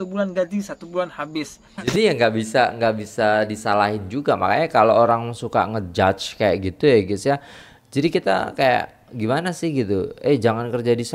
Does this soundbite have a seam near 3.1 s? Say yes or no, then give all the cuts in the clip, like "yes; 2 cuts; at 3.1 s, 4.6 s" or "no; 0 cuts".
no; 1 cut; at 1.7 s